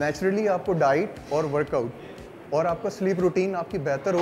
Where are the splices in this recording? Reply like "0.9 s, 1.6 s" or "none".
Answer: none

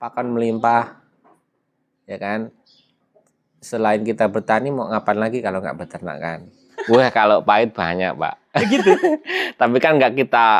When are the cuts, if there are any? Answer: 6.7 s

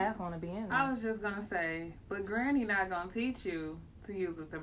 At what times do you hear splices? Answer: none

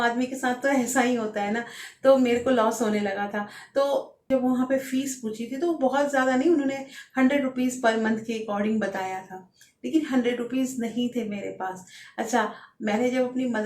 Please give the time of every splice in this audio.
4.3 s

